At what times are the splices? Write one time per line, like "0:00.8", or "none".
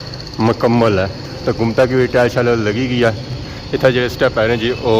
0:01.3